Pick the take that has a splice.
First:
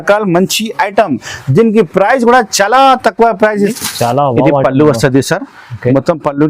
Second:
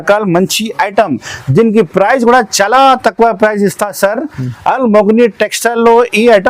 first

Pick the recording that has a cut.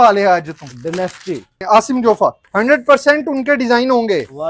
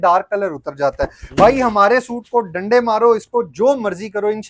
first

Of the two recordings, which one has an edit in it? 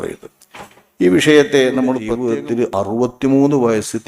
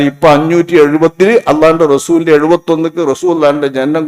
first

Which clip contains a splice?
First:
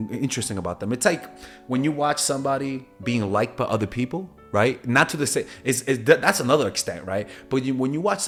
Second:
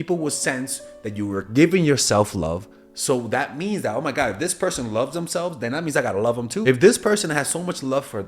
second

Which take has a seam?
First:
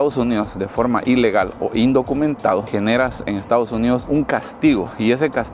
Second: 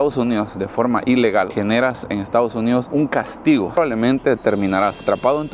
second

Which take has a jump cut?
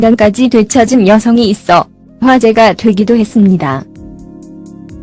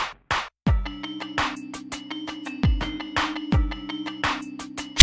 first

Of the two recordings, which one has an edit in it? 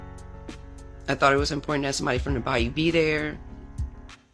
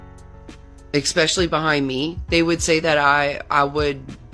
first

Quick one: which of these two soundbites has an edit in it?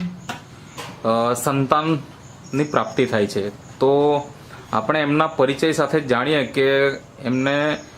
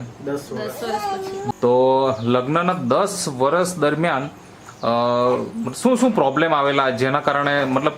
second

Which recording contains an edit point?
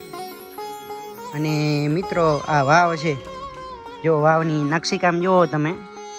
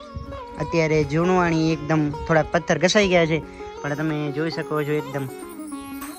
first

